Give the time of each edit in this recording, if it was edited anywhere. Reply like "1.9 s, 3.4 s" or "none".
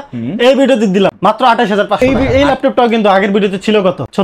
1.2 s, 2.0 s

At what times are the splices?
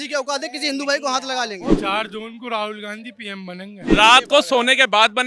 1.8 s, 3.8 s

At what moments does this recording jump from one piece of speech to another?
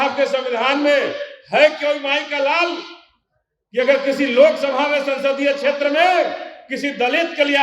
none

